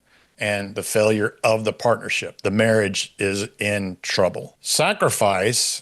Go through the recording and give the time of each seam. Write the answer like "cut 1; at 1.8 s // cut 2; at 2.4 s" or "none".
cut 1; at 4.5 s